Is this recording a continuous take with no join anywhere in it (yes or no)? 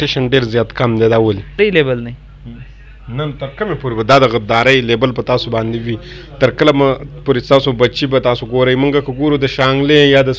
no